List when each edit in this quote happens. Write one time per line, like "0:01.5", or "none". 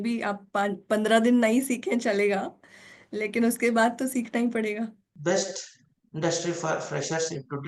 0:05.1

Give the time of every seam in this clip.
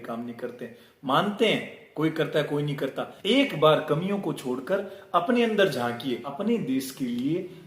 0:06.3

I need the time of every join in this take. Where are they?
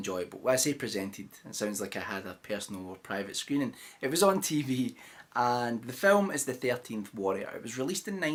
none

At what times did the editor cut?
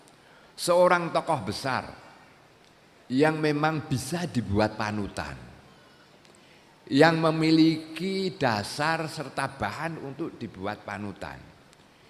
none

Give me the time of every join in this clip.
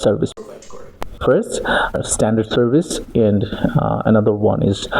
0:01.1
0:02.0

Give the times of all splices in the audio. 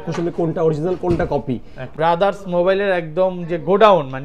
0:01.9

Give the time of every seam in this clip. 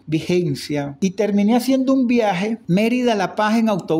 0:01.0

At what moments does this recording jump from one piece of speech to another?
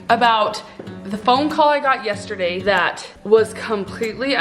0:02.8

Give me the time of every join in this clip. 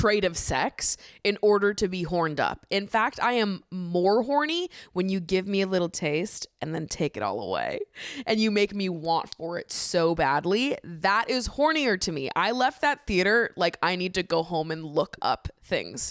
none

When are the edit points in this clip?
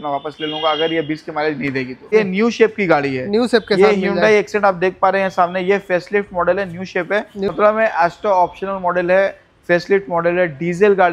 0:02.1
0:07.5

